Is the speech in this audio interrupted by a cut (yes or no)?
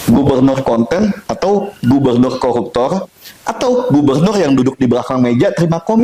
no